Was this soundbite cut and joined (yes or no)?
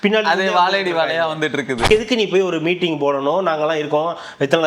yes